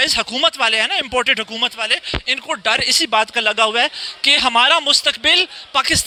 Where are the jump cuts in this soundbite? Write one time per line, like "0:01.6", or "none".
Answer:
none